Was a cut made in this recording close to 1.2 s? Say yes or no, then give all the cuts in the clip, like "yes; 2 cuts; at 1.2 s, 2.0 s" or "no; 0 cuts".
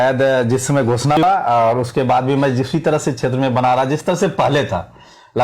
yes; 1 cut; at 1.2 s